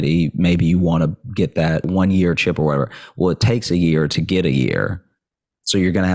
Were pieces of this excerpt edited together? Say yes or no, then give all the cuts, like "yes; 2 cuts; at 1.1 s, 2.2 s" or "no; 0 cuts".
yes; 1 cut; at 1.9 s